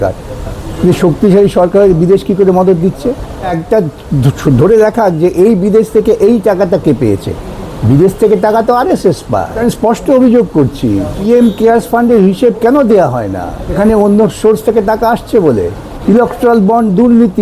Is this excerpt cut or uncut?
cut